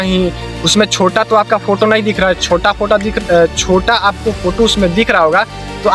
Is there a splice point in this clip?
no; 0 cuts

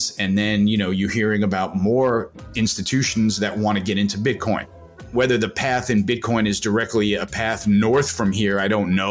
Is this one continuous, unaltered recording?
no; 1 cut; at 5.1 s

